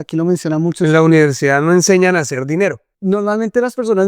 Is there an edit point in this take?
yes; 1 cut; at 2.9 s

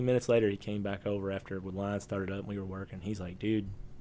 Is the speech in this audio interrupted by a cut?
no; 0 cuts

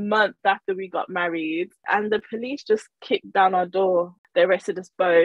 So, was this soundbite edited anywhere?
yes; 2 cuts; at 1.8 s, 4.2 s

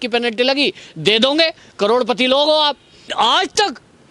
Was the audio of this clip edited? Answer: yes; 1 cut; at 3.1 s

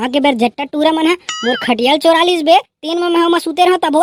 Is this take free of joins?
yes; 0 cuts

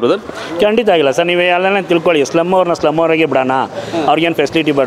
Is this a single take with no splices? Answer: yes; 0 cuts

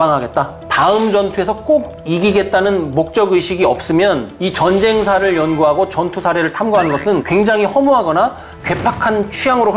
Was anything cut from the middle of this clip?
no; 0 cuts

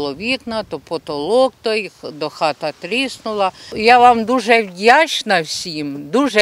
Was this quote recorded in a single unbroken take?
yes; 0 cuts

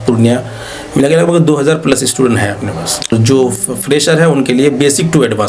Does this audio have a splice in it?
yes; 1 cut; at 3.1 s

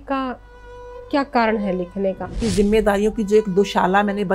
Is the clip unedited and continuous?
no; 1 cut; at 2.3 s

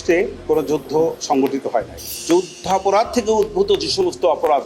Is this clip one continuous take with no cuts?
no; 1 cut; at 2.2 s

